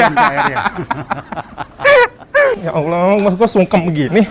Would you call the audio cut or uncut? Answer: cut